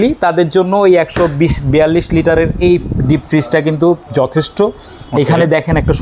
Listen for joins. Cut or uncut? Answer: uncut